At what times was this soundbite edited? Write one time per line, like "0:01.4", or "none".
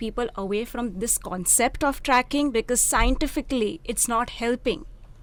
none